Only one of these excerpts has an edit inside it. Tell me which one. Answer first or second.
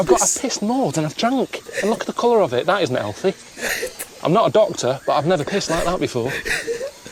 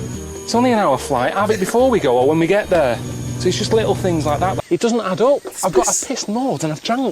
second